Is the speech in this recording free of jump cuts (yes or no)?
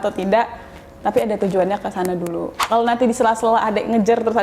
no